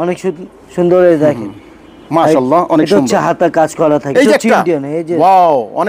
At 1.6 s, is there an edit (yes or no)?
no